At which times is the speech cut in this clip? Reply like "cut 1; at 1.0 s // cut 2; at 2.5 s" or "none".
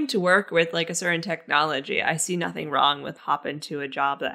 cut 1; at 3.2 s